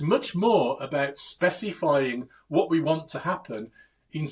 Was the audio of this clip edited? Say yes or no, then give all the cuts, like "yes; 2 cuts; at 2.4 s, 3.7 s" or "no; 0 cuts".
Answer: no; 0 cuts